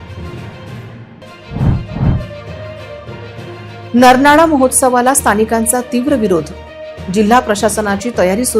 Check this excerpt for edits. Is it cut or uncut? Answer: cut